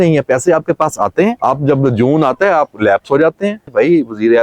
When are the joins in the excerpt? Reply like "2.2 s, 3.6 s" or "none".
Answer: 1.4 s, 3.6 s